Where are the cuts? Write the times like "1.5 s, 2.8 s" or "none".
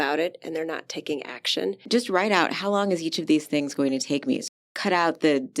1.8 s, 4.6 s